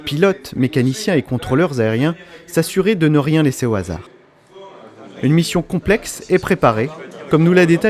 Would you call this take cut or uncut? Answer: cut